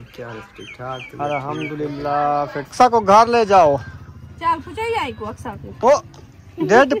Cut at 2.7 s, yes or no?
yes